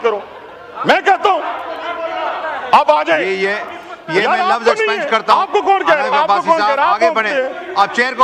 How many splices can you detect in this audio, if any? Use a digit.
0